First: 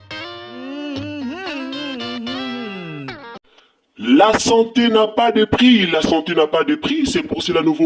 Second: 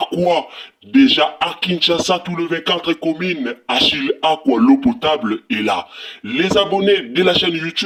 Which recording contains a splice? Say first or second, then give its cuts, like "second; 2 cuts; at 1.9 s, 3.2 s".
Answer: first; 1 cut; at 3.2 s